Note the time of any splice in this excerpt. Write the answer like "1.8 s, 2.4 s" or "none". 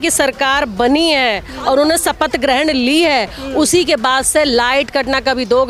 none